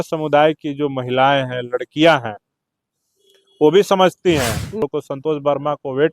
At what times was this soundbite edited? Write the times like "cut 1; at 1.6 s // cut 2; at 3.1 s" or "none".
cut 1; at 4.8 s